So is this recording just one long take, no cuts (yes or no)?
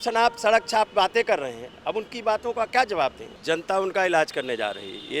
no